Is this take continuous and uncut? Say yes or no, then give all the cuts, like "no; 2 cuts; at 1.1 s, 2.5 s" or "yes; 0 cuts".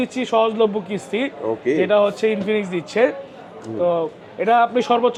yes; 0 cuts